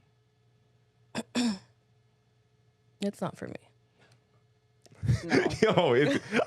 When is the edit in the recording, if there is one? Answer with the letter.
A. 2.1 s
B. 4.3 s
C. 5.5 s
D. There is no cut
D